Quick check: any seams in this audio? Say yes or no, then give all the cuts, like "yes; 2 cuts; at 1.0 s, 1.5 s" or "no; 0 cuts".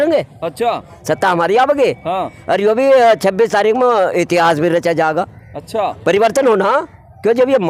no; 0 cuts